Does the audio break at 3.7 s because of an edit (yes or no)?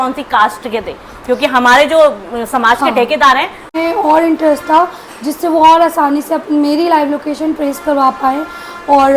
yes